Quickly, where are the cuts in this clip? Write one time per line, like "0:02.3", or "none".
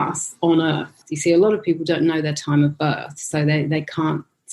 0:01.0